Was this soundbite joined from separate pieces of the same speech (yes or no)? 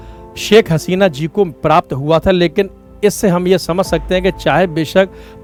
no